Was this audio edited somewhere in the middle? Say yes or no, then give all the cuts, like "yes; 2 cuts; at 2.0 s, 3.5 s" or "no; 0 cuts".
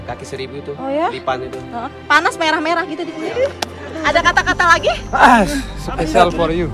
yes; 1 cut; at 3.2 s